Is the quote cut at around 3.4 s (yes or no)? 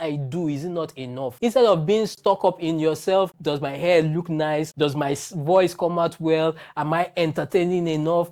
no